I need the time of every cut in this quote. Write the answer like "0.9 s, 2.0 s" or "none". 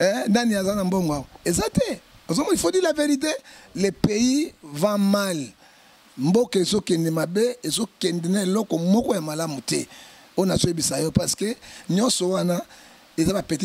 none